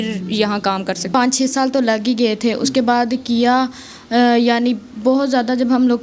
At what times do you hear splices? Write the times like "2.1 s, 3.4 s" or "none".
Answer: 1.0 s